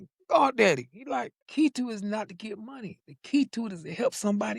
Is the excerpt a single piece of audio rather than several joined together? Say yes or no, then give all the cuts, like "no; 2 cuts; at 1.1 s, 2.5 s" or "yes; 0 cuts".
no; 1 cut; at 1.3 s